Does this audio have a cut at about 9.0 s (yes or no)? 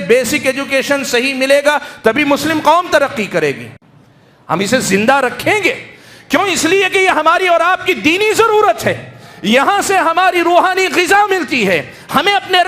no